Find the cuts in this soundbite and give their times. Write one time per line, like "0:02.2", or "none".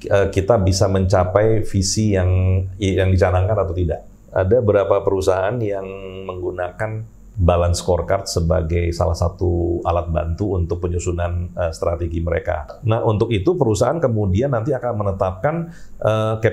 0:04.1
0:12.8

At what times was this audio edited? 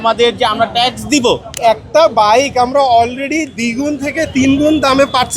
0:01.6

